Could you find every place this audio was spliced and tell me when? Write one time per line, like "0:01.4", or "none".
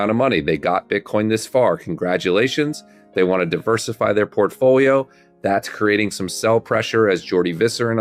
none